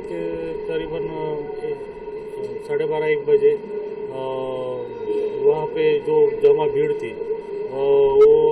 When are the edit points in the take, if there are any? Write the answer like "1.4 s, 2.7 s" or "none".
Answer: none